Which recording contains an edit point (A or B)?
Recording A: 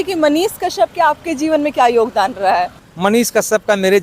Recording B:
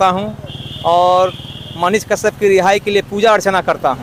A